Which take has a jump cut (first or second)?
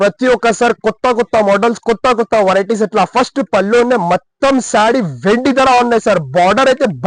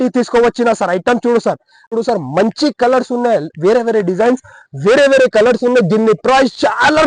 second